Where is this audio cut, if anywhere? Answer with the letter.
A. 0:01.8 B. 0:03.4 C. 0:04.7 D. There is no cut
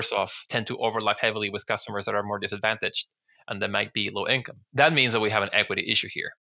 D